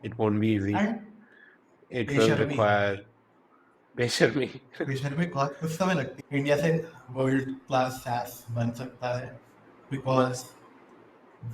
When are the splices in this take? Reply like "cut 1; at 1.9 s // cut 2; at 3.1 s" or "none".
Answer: cut 1; at 6.2 s